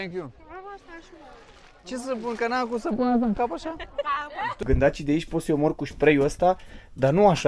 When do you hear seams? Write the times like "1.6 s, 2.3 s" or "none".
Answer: 4.5 s